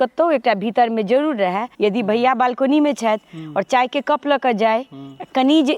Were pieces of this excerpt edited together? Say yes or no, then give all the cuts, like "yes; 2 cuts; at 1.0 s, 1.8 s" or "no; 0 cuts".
yes; 1 cut; at 1.7 s